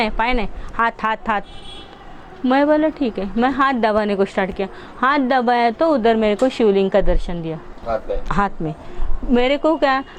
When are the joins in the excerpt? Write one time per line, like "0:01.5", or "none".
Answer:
0:07.7